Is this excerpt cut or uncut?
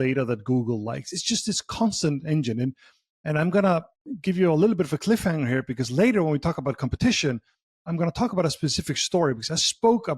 uncut